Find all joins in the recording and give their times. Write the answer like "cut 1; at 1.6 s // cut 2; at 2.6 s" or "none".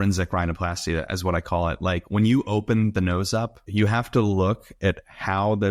cut 1; at 3.6 s